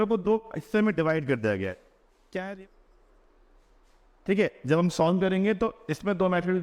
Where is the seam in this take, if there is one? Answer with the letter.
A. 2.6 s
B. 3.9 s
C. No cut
A